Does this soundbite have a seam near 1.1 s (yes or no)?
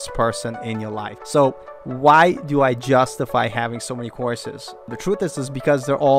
yes